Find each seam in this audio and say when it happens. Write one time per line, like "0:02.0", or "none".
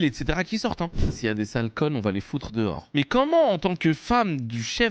0:01.0
0:02.9